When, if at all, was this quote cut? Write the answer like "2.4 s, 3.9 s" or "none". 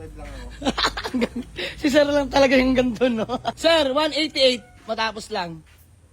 3.5 s